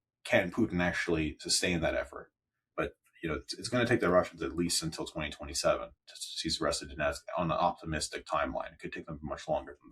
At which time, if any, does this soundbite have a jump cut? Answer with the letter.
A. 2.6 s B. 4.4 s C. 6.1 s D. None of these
A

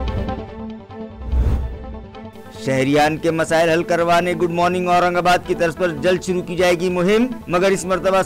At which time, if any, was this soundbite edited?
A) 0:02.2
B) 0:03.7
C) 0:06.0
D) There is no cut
A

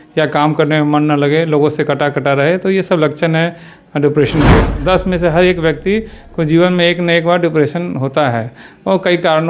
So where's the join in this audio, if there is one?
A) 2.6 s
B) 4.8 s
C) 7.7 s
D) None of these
B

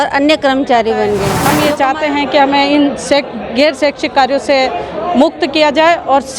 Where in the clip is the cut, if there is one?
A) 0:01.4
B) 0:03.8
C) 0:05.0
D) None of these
A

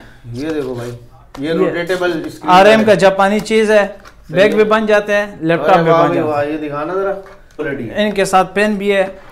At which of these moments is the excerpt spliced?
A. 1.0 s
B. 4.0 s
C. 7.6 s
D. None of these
C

